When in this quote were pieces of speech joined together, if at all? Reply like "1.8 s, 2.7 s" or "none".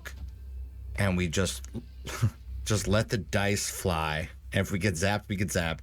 2.5 s, 4.4 s